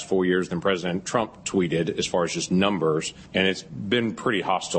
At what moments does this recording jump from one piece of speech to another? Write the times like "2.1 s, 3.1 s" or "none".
3.5 s